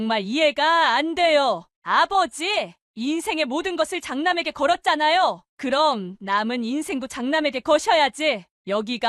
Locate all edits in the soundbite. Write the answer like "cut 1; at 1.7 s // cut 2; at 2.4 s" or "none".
none